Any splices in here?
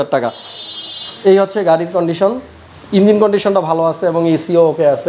no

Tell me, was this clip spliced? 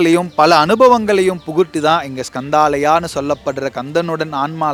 no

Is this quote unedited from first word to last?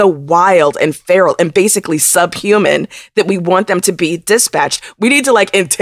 yes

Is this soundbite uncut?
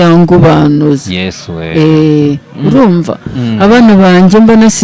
yes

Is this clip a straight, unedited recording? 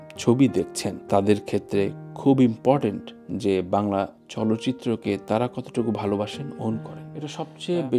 no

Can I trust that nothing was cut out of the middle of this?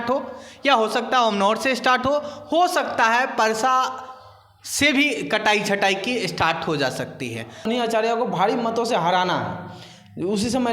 no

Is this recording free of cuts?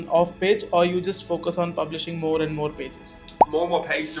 yes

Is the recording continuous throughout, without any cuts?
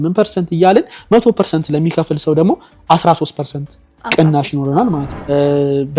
no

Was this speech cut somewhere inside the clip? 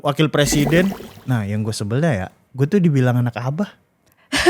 yes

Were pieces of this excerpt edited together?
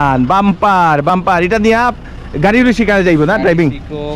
no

